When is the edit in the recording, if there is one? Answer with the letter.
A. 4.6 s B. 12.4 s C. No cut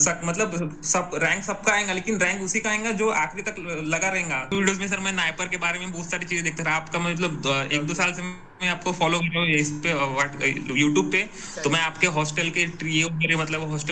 A